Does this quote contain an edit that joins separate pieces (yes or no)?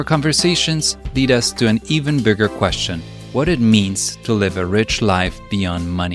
no